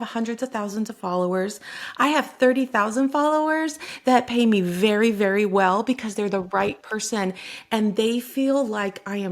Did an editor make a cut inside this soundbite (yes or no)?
no